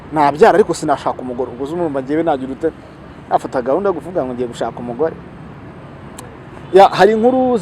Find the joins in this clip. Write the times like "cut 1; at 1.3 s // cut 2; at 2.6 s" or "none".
none